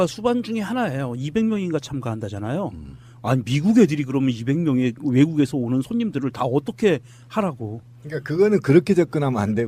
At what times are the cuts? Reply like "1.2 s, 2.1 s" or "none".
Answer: none